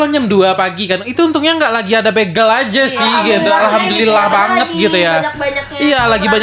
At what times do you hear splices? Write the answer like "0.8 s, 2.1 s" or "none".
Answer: none